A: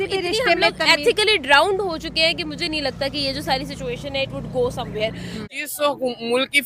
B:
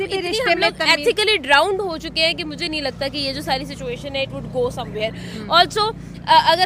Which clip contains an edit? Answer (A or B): A